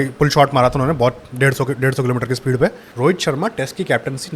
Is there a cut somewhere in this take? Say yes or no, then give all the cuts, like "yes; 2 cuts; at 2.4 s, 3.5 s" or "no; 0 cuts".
yes; 1 cut; at 2.9 s